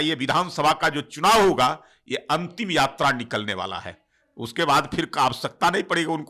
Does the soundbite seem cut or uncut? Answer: uncut